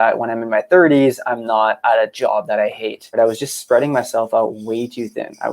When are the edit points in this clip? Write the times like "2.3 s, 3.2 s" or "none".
3.2 s